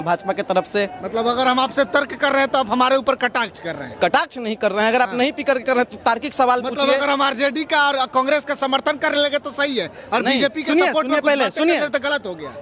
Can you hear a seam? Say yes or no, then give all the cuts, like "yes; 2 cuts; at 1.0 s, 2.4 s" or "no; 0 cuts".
no; 0 cuts